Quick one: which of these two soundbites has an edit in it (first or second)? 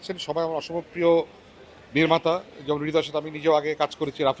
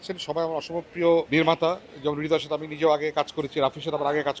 second